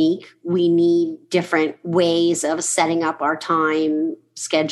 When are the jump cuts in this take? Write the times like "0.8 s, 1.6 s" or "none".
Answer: 1.8 s